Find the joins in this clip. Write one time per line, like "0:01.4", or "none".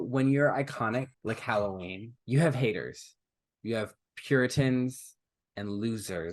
0:01.1
0:02.1